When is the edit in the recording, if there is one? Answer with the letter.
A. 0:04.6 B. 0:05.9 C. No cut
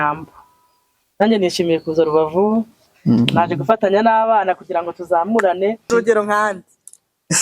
B